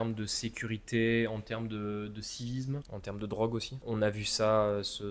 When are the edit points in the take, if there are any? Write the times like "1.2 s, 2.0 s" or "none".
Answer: 2.9 s, 3.8 s